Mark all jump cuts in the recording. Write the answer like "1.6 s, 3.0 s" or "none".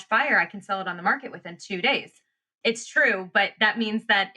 2.5 s